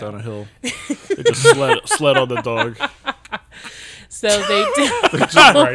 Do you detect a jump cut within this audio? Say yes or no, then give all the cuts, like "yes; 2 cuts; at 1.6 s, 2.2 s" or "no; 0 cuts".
no; 0 cuts